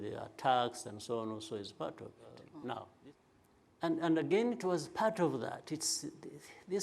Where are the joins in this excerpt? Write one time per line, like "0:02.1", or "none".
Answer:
0:02.9